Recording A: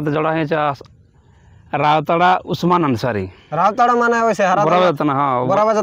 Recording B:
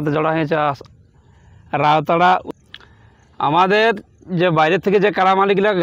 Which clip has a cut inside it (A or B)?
B